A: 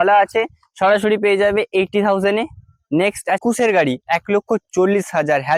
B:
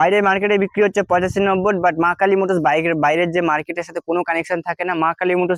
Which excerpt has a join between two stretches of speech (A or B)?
A